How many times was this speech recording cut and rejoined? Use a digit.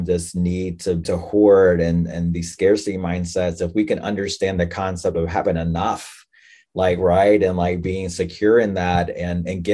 1